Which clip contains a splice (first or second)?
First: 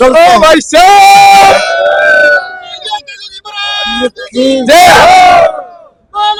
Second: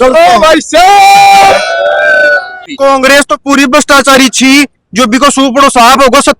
second